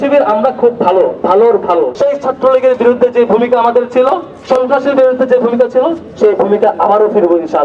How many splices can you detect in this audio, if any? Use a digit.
1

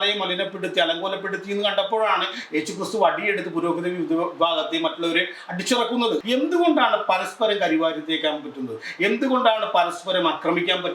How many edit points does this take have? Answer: 1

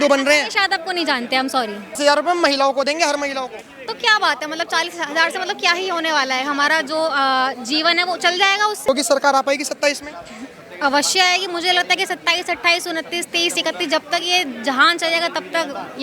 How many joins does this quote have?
2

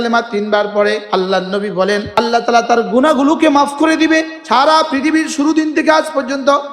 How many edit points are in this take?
3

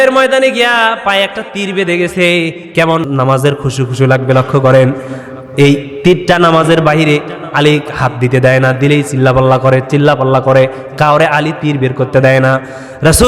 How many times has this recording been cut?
1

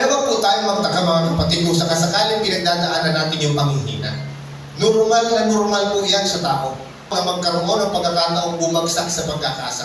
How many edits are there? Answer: 1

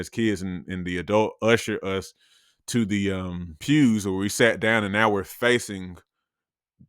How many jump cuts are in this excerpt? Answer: 1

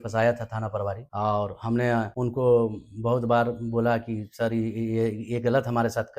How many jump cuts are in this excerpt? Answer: 2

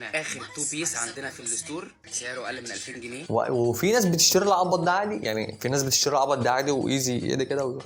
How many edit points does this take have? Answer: 1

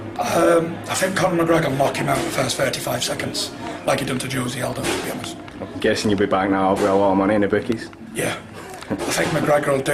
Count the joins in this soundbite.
1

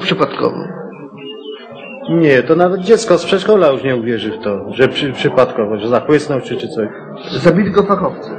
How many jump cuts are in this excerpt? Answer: 1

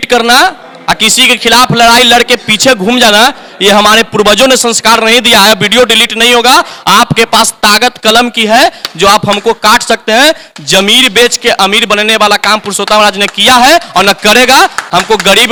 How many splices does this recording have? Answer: 0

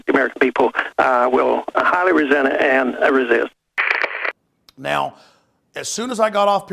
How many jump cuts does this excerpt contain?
0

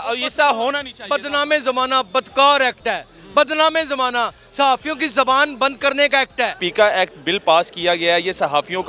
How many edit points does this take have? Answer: 1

